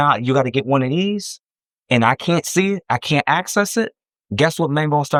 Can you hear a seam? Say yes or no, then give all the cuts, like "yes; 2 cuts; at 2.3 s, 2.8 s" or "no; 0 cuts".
no; 0 cuts